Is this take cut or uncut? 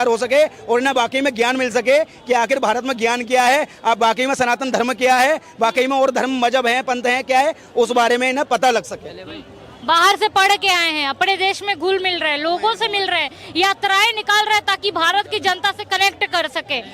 uncut